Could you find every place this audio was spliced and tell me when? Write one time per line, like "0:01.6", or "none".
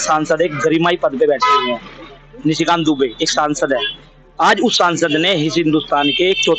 none